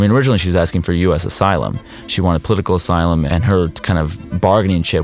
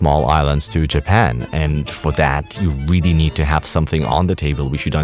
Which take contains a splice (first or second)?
first